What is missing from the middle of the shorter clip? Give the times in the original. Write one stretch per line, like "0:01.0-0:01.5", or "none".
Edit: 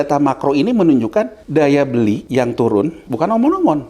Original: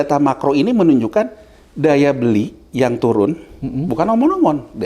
0:01.4-0:01.7
0:02.5-0:02.7
0:03.5-0:03.8